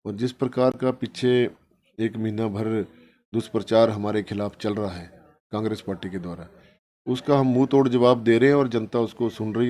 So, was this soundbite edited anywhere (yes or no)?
no